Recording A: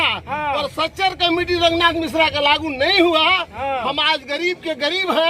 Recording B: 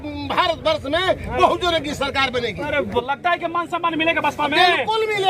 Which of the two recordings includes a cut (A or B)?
B